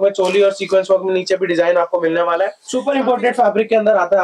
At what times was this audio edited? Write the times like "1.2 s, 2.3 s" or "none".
2.7 s